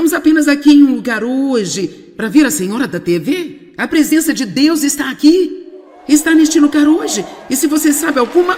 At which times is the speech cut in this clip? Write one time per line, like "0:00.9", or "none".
0:06.6